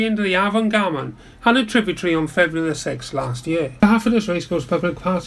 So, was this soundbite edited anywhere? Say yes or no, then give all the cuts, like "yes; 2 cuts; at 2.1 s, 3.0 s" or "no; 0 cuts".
yes; 1 cut; at 3.7 s